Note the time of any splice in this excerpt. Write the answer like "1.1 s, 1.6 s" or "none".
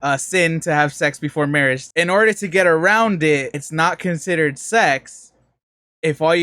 1.8 s, 3.6 s

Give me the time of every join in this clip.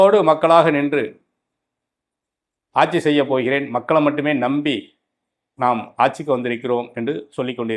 none

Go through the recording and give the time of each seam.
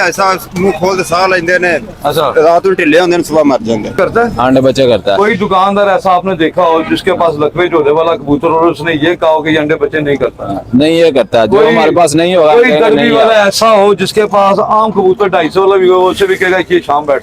4.0 s

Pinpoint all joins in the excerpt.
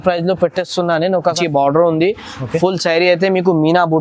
1.4 s

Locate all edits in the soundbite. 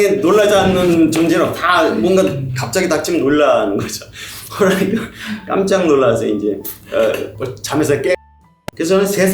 8.2 s

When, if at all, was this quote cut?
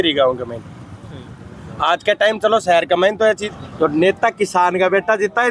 3.5 s

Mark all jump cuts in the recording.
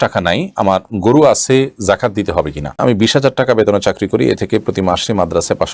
2.8 s

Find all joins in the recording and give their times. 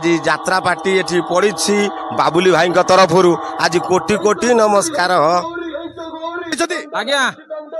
6.5 s

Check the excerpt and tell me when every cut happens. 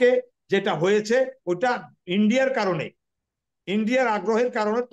none

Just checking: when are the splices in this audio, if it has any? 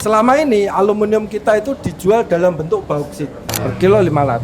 3.5 s

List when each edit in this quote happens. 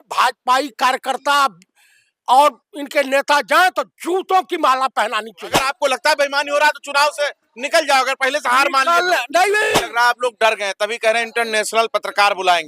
5.6 s, 9.8 s

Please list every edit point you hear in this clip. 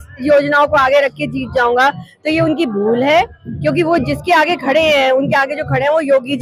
none

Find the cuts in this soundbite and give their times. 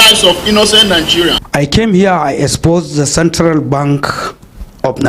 1.5 s

